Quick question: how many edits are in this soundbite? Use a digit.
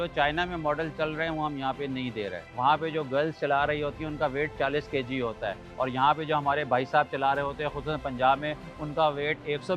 2